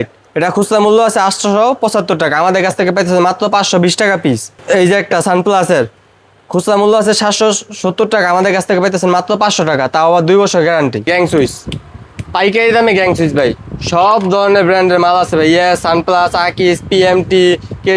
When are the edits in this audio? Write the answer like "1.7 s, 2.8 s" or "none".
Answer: 4.5 s, 11.1 s